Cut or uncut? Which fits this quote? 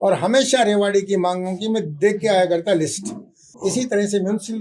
cut